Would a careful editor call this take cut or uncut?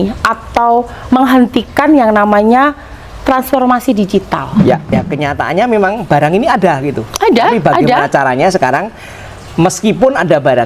cut